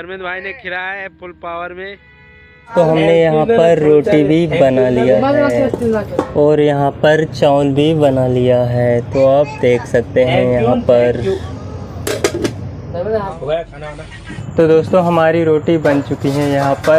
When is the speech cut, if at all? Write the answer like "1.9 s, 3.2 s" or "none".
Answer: 2.7 s, 13.3 s